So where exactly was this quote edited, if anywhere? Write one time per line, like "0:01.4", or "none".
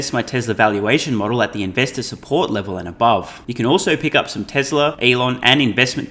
0:03.4
0:05.0